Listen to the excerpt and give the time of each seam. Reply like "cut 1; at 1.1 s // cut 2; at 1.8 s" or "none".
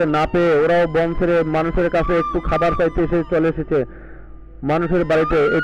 none

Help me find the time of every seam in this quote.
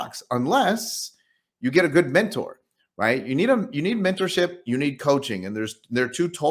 none

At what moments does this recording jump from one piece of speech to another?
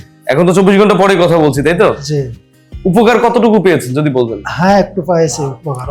none

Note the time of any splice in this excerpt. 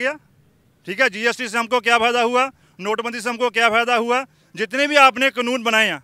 none

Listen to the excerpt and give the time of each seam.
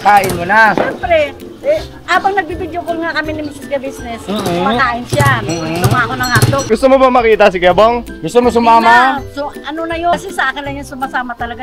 cut 1; at 6.6 s // cut 2; at 10.1 s

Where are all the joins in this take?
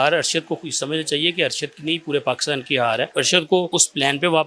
cut 1; at 3.1 s // cut 2; at 3.7 s

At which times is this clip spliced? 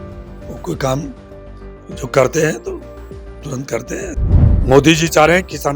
cut 1; at 4.2 s

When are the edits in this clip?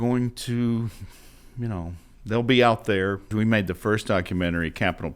cut 1; at 3.2 s

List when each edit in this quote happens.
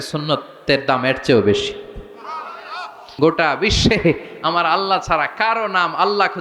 cut 1; at 3.1 s

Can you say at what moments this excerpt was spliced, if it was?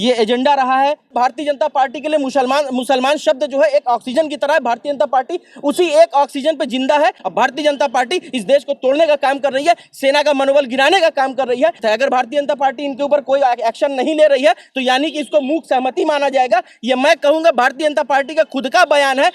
cut 1; at 1.1 s // cut 2; at 7.2 s // cut 3; at 11.8 s

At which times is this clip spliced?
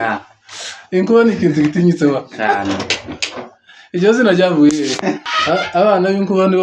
cut 1; at 5.2 s

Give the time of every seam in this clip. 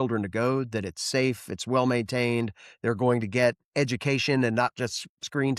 none

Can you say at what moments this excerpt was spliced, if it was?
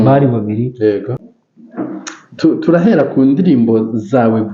cut 1; at 1.1 s

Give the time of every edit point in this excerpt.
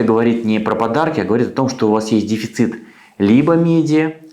none

